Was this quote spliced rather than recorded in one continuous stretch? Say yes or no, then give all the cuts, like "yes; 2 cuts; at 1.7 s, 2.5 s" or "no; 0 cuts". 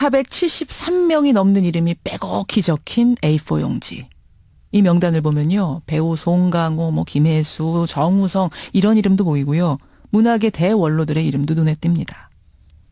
no; 0 cuts